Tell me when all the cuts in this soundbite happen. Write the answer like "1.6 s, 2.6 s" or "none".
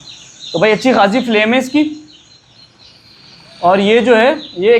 none

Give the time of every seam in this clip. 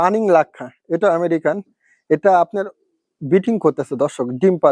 none

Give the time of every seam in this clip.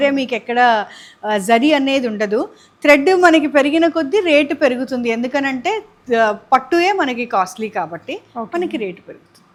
none

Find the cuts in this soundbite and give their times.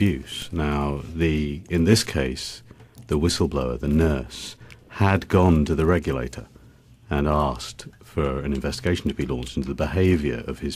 none

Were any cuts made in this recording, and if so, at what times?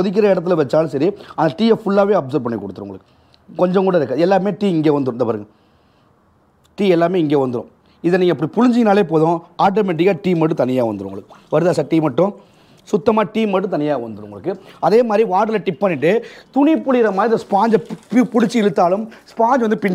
none

